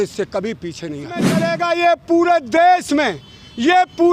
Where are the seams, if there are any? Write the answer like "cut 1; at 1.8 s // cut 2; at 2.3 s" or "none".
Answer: cut 1; at 1.4 s